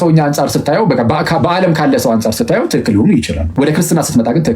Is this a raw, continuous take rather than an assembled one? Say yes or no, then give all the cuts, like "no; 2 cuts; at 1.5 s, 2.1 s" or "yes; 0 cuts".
no; 1 cut; at 3.4 s